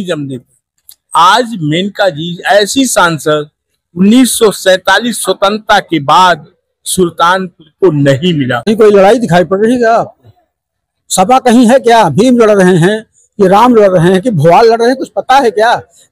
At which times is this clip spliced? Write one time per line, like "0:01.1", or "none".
0:08.7